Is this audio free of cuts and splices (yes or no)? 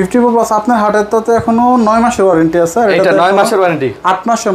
yes